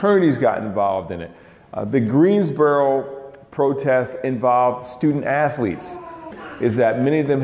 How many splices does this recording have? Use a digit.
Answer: 1